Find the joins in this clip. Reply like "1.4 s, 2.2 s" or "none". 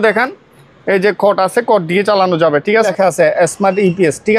2.9 s